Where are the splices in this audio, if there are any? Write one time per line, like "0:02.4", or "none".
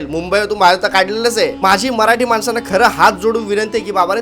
0:01.6